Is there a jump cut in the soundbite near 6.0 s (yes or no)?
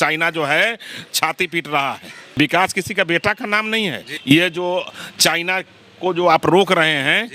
no